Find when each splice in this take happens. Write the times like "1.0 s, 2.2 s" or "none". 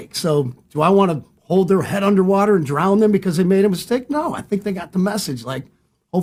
none